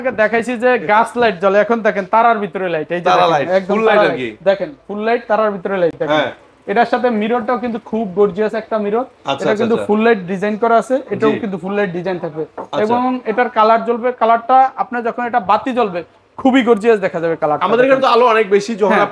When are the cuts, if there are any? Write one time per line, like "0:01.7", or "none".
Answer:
none